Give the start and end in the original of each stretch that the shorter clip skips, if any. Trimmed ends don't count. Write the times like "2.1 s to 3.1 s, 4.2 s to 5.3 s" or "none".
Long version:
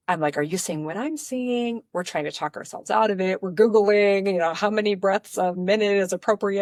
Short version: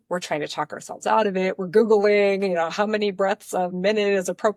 none